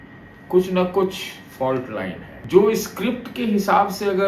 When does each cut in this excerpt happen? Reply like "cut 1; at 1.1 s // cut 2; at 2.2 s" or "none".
cut 1; at 2.3 s